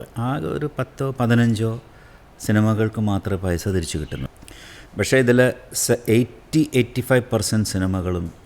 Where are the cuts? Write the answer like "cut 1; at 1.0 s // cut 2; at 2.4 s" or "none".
cut 1; at 4.3 s